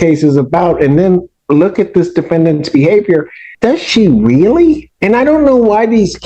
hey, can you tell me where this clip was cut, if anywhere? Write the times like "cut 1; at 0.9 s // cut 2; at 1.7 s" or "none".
cut 1; at 3.4 s // cut 2; at 4.9 s